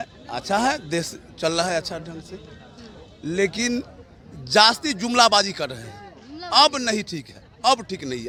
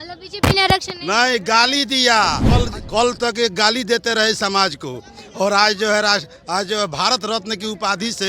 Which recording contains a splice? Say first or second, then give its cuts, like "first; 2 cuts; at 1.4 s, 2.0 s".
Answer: second; 1 cut; at 2.4 s